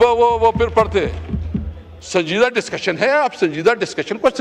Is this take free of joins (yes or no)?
yes